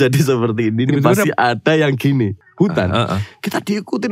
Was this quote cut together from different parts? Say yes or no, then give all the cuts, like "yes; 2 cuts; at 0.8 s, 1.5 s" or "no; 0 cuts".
yes; 1 cut; at 2.4 s